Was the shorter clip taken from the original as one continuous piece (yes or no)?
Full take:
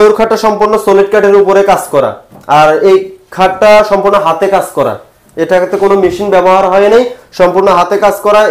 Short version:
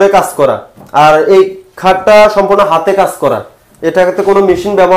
yes